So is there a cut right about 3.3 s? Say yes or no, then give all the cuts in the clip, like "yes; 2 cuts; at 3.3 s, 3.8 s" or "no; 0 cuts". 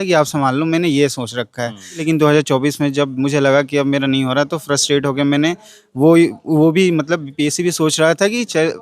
no; 1 cut; at 2.0 s